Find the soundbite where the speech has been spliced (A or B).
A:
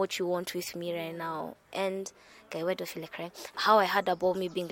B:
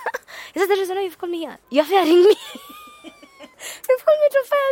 A